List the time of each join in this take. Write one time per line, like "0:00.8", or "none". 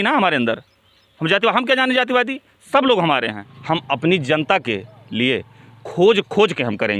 0:03.5